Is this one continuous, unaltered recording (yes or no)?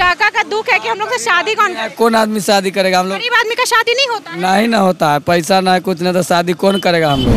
yes